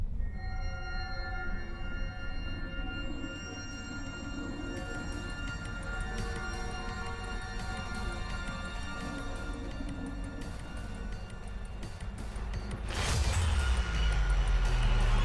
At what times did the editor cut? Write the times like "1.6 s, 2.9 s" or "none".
none